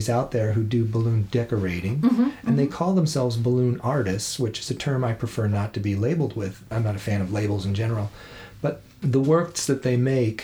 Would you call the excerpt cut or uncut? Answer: uncut